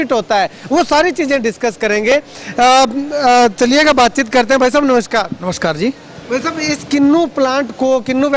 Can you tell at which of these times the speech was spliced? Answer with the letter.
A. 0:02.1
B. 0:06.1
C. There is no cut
C